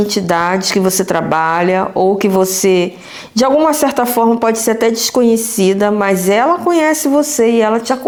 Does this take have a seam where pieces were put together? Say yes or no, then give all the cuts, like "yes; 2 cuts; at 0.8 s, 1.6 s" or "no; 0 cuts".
no; 0 cuts